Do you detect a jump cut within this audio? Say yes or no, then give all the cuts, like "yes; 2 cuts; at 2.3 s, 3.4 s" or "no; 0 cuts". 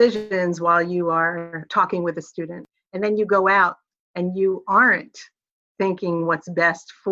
yes; 2 cuts; at 1.6 s, 2.7 s